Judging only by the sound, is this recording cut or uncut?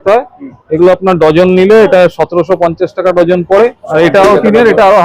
cut